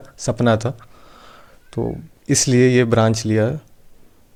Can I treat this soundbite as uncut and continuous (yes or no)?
yes